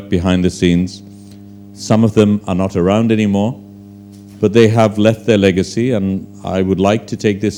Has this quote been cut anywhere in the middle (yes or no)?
no